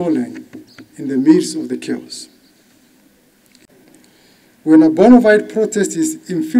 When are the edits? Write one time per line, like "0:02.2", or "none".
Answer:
0:03.6